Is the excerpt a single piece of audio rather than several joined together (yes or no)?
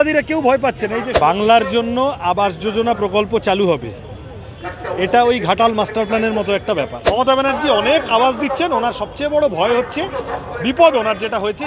no